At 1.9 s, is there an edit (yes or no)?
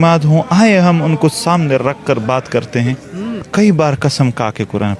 no